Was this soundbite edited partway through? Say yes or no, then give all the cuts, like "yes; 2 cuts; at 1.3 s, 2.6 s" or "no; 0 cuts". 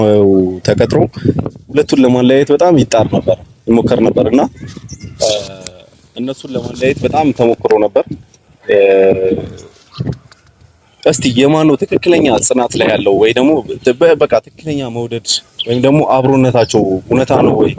no; 0 cuts